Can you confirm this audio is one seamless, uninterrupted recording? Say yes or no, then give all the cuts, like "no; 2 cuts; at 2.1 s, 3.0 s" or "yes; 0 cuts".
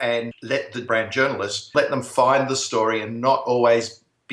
no; 2 cuts; at 0.8 s, 1.7 s